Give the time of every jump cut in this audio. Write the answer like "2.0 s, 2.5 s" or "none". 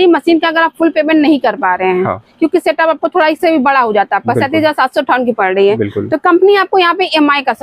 none